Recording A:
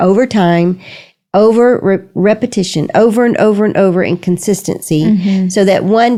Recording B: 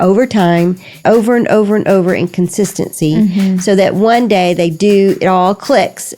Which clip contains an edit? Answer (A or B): B